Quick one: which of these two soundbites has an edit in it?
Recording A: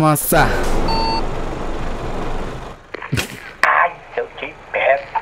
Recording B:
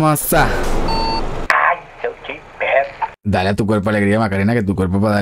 B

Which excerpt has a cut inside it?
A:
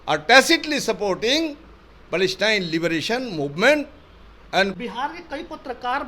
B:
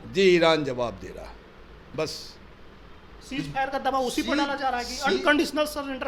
A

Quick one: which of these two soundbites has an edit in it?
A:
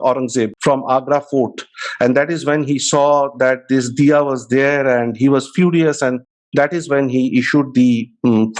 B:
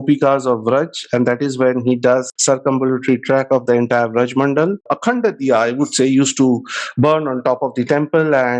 B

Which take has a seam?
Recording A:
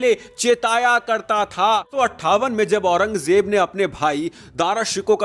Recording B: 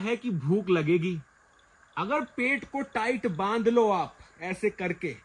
A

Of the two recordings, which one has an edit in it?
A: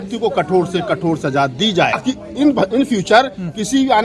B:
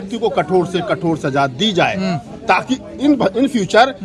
A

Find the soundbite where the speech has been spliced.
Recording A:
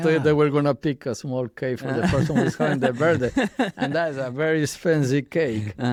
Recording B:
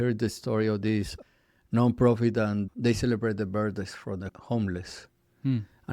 B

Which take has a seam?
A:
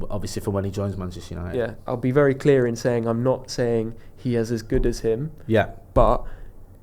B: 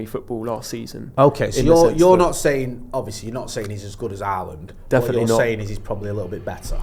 A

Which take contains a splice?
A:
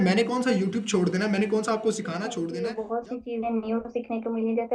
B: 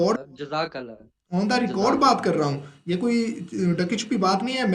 A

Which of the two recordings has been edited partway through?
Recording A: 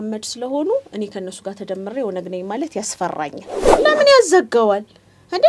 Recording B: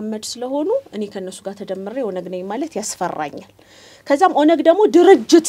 A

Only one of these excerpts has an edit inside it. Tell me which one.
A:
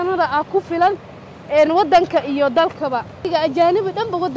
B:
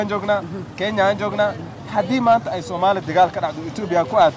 A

